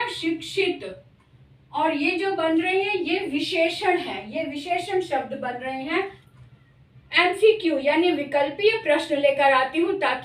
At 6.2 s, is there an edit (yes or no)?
yes